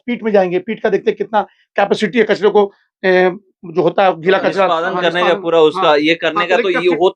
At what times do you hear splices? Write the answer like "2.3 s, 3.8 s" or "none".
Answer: none